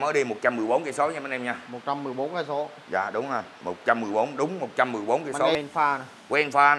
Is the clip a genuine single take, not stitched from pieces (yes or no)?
no